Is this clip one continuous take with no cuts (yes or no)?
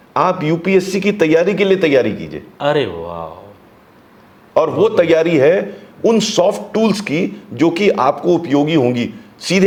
yes